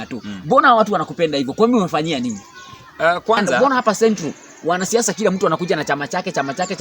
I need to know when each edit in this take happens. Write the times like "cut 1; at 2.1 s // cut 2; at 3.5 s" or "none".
cut 1; at 3.6 s